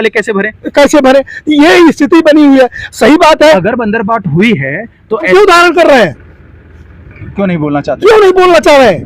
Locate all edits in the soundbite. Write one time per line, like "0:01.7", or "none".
0:05.3